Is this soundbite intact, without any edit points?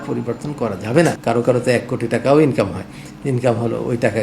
no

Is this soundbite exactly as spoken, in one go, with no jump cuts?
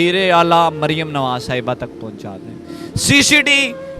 no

